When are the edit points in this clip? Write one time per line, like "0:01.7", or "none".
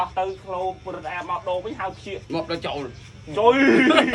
0:02.2